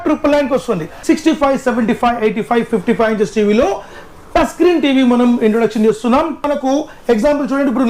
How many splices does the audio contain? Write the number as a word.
two